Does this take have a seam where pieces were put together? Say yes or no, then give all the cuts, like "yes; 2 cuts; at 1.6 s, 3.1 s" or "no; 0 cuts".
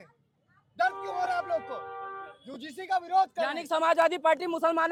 no; 0 cuts